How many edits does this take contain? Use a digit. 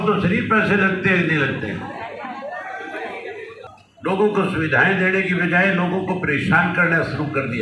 1